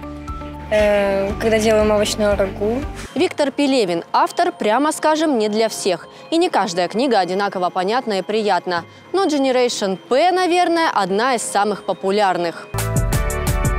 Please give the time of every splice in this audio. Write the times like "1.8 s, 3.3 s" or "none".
3.0 s, 12.7 s